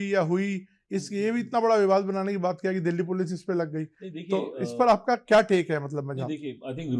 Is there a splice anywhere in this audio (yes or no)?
no